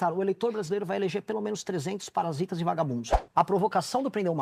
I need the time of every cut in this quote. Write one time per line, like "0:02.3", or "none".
0:03.1